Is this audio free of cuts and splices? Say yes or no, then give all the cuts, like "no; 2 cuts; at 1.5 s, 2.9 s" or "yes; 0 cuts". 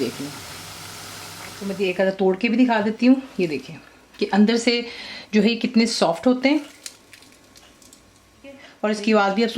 no; 2 cuts; at 1.7 s, 8.7 s